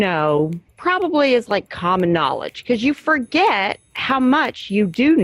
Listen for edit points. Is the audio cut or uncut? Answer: uncut